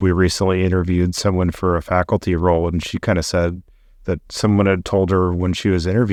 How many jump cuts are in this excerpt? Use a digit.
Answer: 0